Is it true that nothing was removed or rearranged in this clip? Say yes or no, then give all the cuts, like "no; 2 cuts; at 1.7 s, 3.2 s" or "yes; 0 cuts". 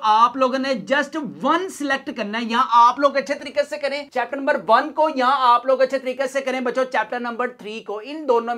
yes; 0 cuts